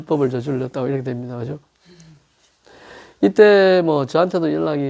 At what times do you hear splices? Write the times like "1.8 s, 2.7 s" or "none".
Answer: none